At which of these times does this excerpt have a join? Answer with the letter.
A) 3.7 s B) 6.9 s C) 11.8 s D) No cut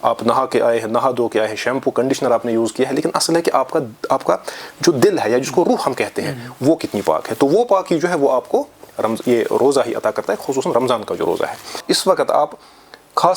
C